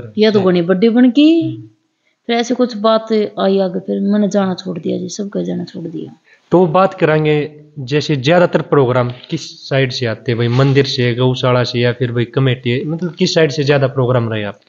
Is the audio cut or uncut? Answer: uncut